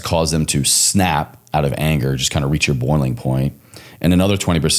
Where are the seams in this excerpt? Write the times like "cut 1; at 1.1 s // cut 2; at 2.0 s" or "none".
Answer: none